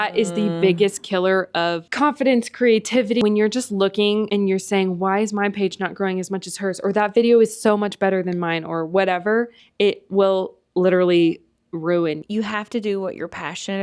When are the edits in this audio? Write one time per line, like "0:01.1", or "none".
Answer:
0:01.8
0:03.2
0:04.3
0:12.2

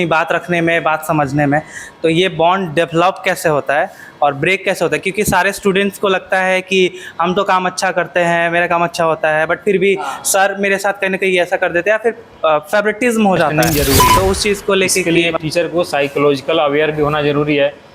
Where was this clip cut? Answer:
0:15.0

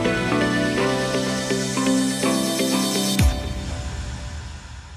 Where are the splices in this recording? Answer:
0:02.1

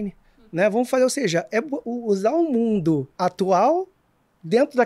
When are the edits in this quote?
0:03.1

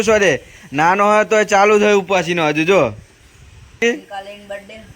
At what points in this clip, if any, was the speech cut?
0:03.8

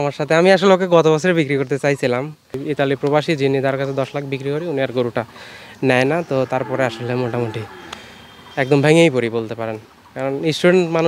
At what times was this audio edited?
0:02.6

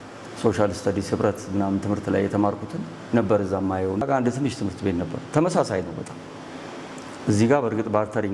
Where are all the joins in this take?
0:04.0

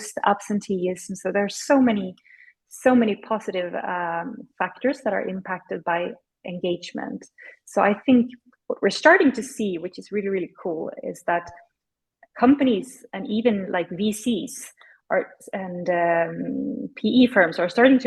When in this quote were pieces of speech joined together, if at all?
none

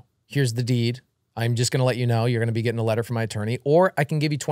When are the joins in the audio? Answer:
none

